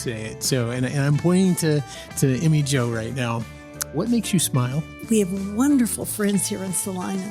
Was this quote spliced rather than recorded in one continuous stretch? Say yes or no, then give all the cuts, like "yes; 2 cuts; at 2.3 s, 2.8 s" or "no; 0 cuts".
yes; 1 cut; at 4.9 s